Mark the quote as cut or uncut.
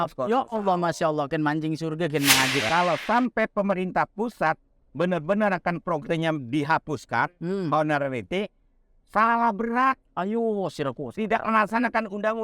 cut